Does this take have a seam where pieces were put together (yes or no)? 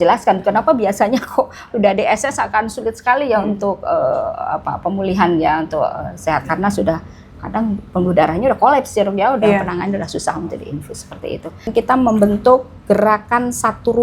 yes